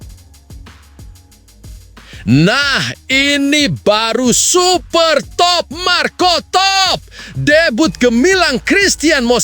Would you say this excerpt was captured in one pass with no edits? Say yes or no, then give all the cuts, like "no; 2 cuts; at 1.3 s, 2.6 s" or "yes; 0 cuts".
no; 1 cut; at 2.2 s